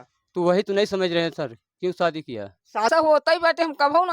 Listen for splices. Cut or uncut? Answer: cut